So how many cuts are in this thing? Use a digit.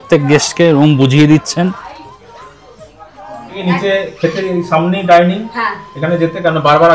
1